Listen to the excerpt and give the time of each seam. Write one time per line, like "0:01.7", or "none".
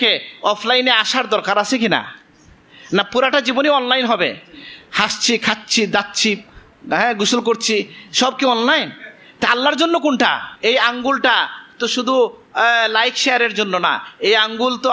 0:10.5